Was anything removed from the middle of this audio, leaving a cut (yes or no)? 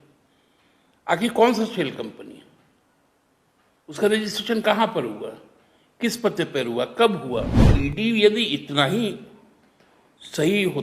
yes